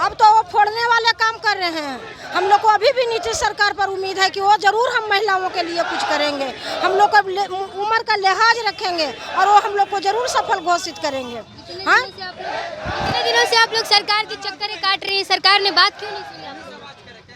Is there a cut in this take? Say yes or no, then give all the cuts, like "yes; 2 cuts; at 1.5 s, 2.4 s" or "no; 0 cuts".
no; 0 cuts